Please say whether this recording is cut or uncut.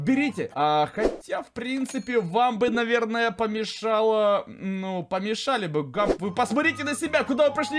uncut